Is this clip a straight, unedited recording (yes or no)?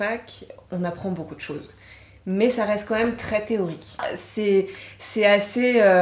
no